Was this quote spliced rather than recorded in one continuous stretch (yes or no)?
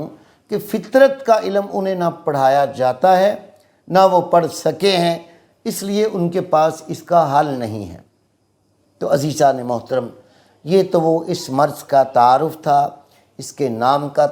no